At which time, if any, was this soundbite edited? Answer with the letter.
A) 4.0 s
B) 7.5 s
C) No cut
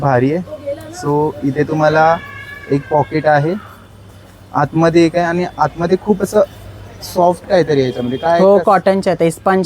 C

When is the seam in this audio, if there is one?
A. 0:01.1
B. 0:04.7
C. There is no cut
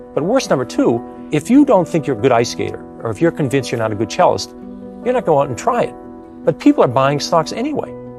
A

